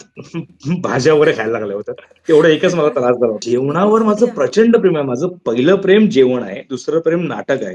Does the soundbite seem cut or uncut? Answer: cut